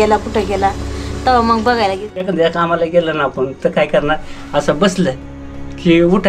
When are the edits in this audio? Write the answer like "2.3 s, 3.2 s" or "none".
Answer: 2.0 s